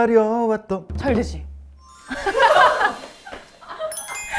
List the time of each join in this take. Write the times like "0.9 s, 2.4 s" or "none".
none